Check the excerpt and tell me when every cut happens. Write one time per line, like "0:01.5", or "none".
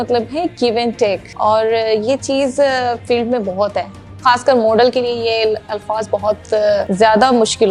0:01.3
0:04.0
0:06.9